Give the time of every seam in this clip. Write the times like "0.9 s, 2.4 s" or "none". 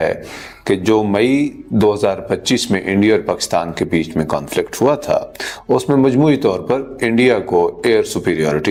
none